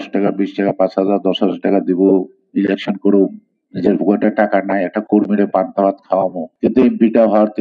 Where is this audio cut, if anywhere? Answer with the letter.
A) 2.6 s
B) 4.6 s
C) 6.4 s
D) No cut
C